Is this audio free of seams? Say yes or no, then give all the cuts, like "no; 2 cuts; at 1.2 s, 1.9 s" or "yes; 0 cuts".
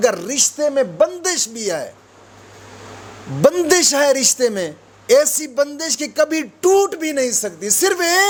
yes; 0 cuts